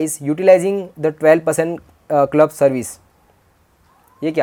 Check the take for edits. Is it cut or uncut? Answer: uncut